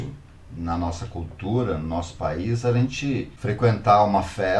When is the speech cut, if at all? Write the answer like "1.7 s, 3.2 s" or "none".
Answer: 3.3 s